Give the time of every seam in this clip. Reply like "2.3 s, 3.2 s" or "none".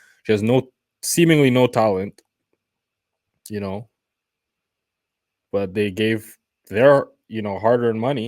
none